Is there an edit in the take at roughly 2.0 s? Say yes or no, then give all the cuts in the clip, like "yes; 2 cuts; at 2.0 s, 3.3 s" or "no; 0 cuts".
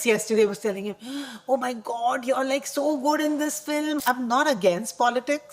no; 1 cut; at 4.0 s